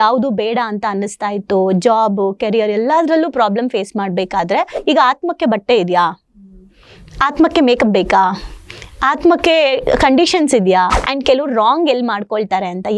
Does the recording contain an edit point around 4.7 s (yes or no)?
yes